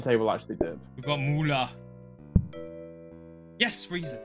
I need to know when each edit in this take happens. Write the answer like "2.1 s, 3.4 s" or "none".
none